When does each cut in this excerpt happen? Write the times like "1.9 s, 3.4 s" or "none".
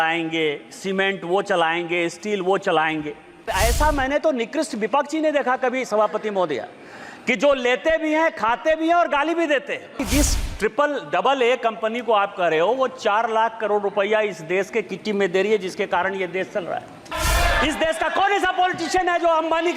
3.5 s, 10.0 s, 17.1 s